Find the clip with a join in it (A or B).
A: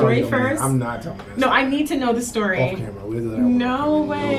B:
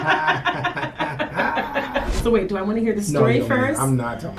B